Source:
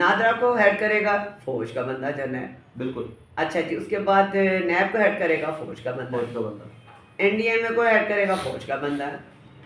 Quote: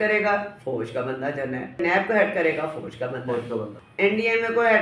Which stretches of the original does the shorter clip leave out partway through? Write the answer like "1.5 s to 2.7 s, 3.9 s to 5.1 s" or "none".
2.6 s to 4.6 s, 6.6 s to 7.0 s